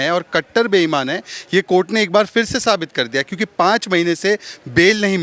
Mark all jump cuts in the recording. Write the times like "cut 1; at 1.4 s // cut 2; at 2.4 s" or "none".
none